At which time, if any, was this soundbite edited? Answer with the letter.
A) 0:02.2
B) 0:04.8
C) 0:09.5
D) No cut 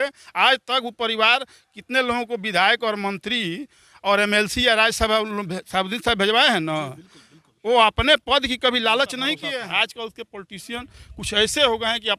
C